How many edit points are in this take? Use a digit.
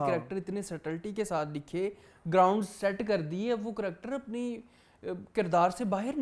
0